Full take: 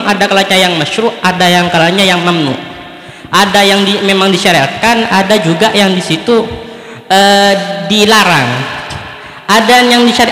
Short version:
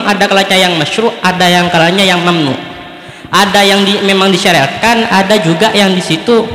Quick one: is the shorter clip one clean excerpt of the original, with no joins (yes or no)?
yes